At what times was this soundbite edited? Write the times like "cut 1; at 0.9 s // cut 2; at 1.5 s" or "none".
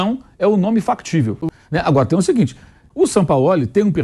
cut 1; at 1.4 s // cut 2; at 2.8 s